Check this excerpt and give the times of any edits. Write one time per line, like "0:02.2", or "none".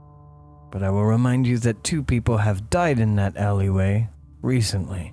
none